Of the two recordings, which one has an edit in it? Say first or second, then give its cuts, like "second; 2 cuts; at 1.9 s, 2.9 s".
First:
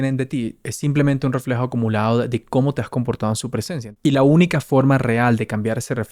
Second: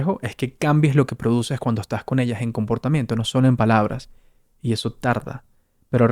first; 1 cut; at 3.8 s